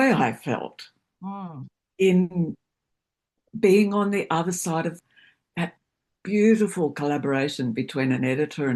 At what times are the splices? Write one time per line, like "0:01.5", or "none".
0:05.0